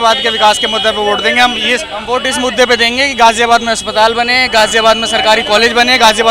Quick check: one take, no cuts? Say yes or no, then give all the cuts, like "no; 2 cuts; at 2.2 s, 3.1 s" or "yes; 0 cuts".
yes; 0 cuts